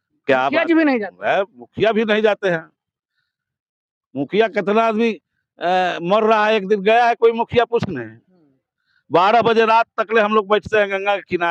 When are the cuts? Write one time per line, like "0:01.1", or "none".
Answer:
none